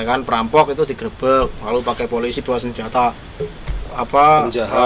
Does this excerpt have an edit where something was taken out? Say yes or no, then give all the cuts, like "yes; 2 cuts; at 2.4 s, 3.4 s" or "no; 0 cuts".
no; 0 cuts